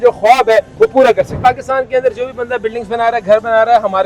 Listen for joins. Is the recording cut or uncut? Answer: cut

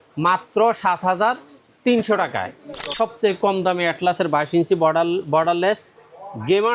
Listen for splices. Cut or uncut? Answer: cut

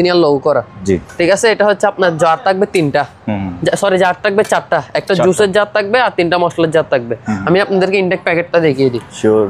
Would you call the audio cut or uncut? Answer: uncut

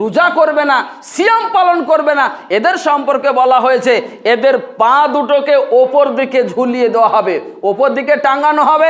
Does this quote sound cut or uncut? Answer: uncut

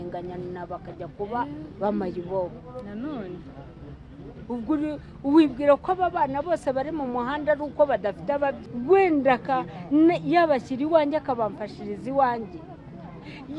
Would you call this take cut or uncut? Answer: cut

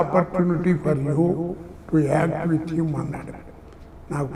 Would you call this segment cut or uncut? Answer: uncut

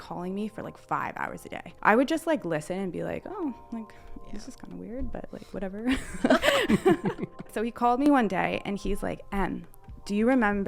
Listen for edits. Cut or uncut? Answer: cut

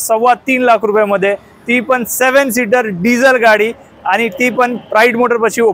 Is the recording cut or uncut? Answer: uncut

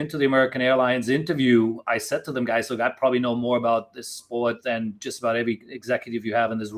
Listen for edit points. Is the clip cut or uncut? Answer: uncut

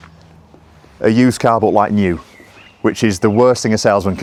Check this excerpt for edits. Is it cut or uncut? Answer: uncut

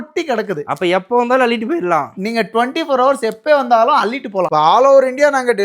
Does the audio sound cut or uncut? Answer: cut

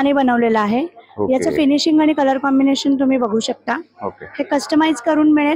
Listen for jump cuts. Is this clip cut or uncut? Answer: uncut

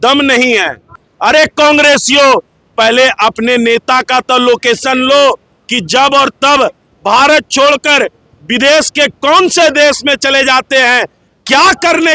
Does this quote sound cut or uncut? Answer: cut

